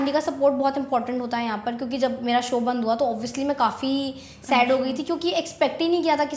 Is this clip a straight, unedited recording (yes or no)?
yes